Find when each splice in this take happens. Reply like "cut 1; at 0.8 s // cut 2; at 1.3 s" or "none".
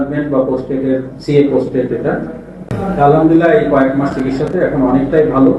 cut 1; at 2.6 s